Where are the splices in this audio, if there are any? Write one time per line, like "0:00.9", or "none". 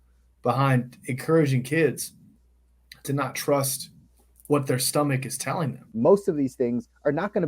0:05.8